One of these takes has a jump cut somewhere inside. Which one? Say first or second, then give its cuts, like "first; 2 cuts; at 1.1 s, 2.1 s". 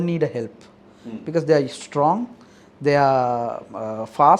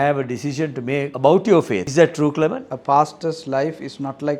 second; 3 cuts; at 1.1 s, 1.9 s, 2.7 s